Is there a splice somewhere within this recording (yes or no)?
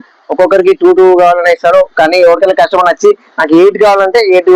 no